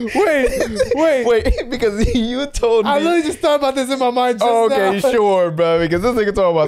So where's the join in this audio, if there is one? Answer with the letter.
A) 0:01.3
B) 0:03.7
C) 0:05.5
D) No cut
D